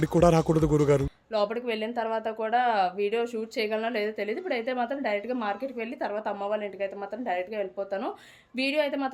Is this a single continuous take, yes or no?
yes